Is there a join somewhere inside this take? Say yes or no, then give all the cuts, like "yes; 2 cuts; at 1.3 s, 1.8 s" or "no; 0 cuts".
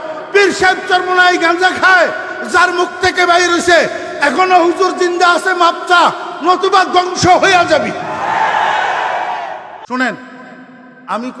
yes; 1 cut; at 9.8 s